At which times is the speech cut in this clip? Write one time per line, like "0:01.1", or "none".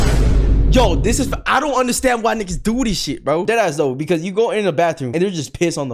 0:03.4